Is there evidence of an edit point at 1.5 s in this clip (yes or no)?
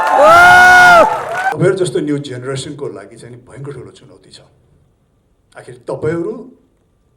yes